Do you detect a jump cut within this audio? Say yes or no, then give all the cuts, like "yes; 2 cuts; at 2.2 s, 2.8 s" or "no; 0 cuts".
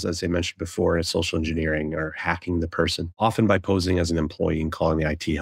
yes; 1 cut; at 3.1 s